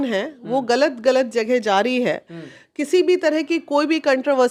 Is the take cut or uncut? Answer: uncut